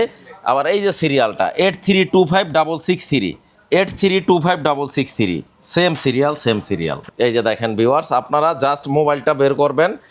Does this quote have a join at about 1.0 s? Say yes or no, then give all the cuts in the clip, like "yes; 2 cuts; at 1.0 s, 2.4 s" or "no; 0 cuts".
no; 1 cut; at 7.0 s